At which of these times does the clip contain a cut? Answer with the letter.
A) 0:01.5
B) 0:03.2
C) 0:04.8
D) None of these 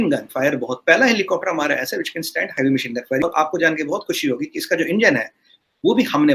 B